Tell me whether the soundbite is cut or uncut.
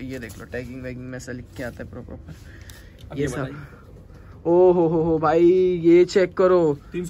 uncut